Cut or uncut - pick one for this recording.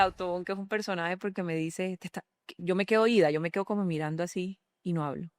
uncut